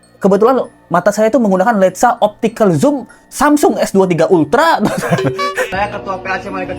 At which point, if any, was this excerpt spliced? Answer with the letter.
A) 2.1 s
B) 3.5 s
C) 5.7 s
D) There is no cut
C